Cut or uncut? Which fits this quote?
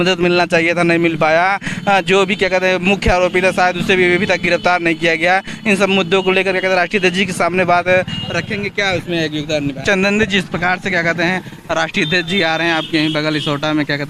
cut